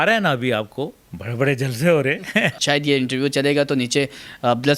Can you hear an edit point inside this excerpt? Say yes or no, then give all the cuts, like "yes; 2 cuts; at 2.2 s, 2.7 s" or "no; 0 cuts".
yes; 1 cut; at 2.5 s